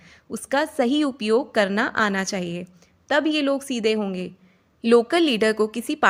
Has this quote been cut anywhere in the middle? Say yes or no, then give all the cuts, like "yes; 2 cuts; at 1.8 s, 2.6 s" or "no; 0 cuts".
no; 0 cuts